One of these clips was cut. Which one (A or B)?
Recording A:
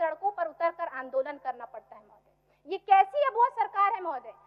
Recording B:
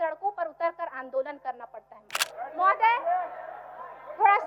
B